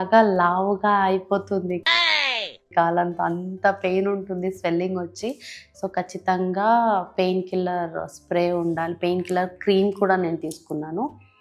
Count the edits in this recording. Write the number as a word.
zero